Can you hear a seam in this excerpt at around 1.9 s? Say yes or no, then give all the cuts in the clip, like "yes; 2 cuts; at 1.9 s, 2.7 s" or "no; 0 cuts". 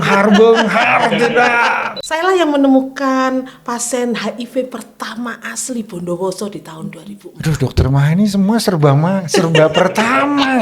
yes; 1 cut; at 1.9 s